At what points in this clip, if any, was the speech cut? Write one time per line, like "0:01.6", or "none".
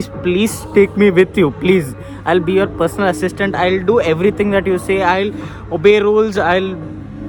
none